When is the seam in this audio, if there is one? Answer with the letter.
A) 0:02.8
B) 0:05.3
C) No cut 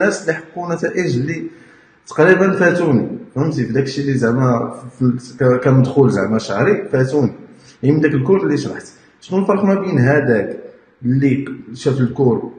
C